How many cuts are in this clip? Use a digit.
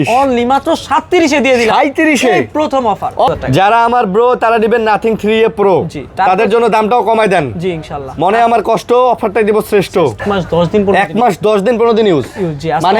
2